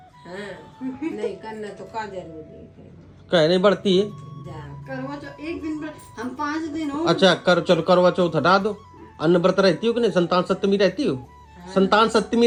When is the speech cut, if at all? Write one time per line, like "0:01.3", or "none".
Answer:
none